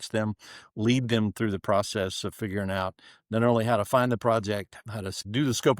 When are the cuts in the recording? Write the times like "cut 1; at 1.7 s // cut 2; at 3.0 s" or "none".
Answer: cut 1; at 4.8 s